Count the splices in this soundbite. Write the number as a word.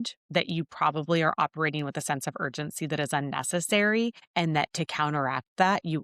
one